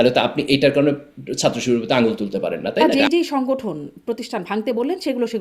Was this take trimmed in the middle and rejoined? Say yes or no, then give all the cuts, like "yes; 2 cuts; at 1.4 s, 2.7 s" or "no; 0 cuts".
yes; 1 cut; at 2.9 s